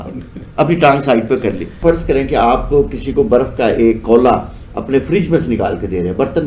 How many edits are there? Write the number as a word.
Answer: one